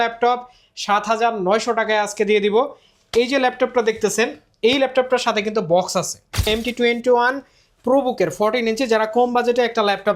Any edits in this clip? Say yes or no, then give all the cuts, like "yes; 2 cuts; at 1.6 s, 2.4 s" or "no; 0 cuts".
yes; 1 cut; at 6.5 s